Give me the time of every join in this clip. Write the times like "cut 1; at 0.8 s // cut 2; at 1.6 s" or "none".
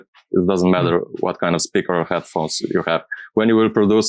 none

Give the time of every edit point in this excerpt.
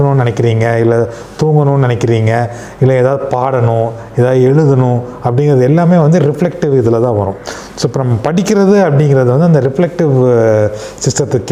none

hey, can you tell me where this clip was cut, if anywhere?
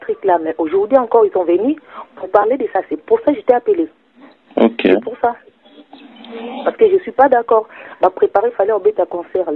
none

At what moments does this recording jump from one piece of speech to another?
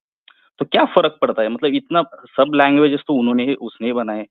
none

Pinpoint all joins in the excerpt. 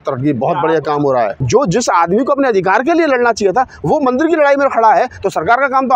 cut 1; at 1.4 s

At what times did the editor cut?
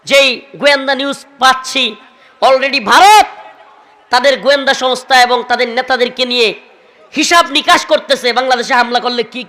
none

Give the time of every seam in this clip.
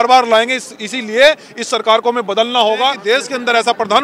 cut 1; at 3.0 s

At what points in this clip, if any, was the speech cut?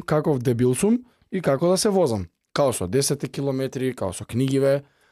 none

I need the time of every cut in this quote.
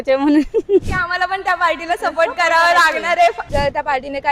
cut 1; at 0.9 s // cut 2; at 3.4 s

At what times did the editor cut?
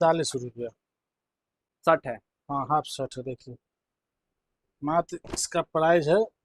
cut 1; at 1.7 s

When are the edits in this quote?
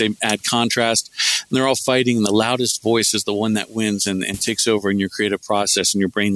none

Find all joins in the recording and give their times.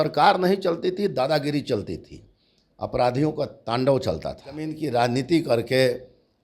cut 1; at 4.8 s

